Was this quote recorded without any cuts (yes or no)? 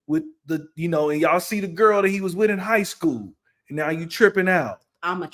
yes